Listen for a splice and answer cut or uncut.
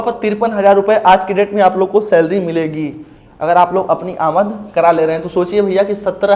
uncut